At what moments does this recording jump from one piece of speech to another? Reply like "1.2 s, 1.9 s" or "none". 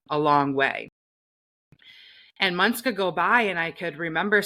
none

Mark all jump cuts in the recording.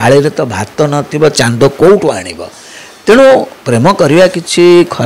none

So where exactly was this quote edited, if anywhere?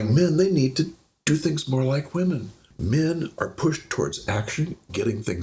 2.7 s

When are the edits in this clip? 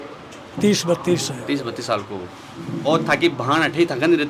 none

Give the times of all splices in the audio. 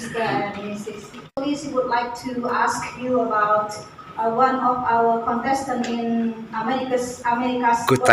1.3 s

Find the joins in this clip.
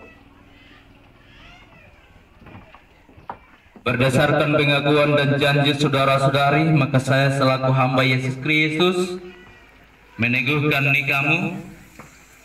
none

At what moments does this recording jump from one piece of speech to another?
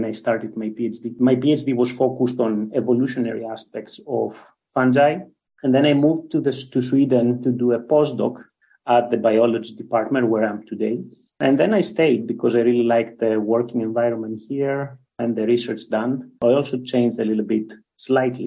1.0 s

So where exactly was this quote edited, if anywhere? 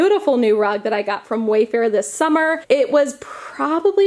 none

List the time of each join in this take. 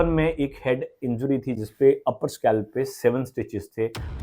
none

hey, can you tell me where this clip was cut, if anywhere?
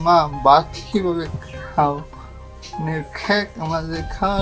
none

